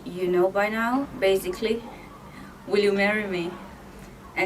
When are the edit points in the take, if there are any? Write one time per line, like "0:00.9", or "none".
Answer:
0:01.1